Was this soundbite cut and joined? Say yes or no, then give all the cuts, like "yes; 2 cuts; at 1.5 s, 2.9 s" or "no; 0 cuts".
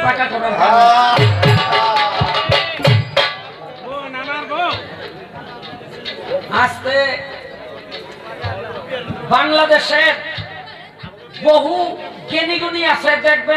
no; 0 cuts